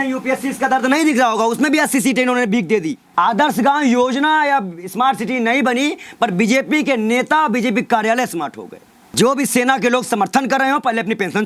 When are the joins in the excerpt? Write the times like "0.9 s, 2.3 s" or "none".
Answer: 3.0 s, 9.1 s

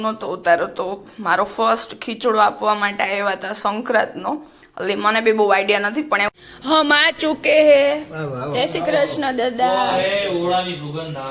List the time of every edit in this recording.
6.3 s

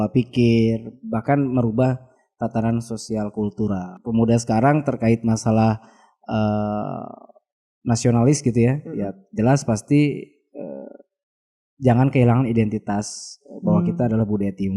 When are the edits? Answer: 3.9 s

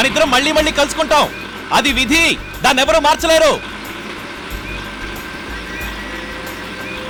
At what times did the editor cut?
none

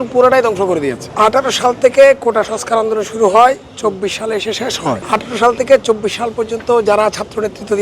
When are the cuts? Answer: none

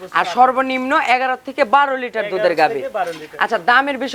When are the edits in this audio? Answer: none

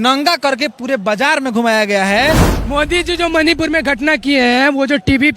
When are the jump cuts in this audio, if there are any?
2.5 s

